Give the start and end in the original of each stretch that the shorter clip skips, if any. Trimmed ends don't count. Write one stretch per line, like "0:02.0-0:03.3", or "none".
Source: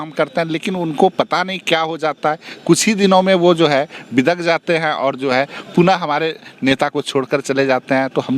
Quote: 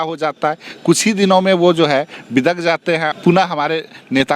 0:04.9-0:05.6

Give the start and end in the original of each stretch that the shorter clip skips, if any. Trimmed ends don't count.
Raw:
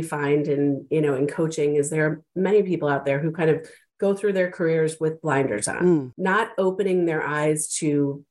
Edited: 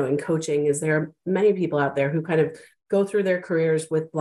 none

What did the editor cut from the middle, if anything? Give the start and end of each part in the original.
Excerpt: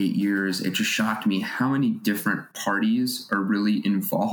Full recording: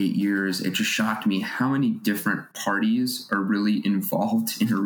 none

